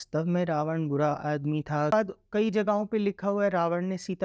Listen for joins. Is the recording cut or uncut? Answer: cut